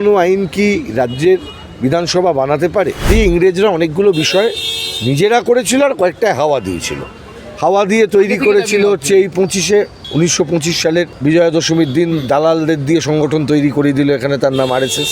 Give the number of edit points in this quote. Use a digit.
3